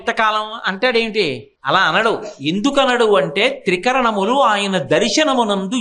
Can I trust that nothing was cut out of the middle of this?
no; 1 cut; at 1.5 s

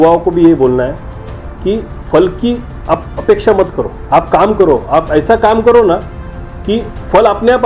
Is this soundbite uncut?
no; 2 cuts; at 2.7 s, 3.9 s

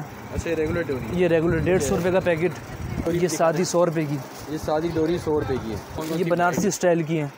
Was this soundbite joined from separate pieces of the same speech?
yes; 2 cuts; at 3.0 s, 6.0 s

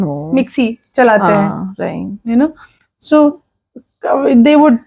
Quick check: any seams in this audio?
no; 0 cuts

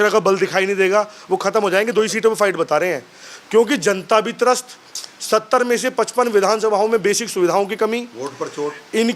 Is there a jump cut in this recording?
no; 0 cuts

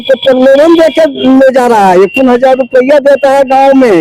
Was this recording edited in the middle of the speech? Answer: no; 0 cuts

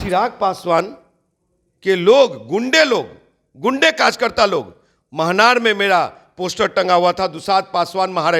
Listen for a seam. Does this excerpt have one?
no; 0 cuts

